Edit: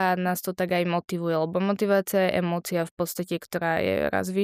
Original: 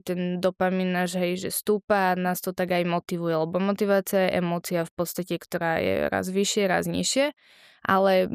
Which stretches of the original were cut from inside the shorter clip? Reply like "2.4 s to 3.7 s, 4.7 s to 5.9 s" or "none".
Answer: none